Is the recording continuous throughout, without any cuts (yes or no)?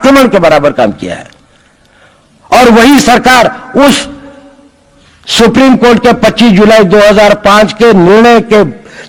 yes